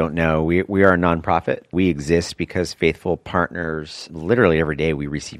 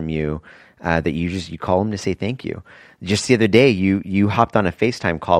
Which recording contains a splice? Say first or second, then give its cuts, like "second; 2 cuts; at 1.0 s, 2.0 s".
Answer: first; 1 cut; at 1.7 s